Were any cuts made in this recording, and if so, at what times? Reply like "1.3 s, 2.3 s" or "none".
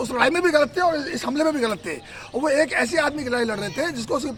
none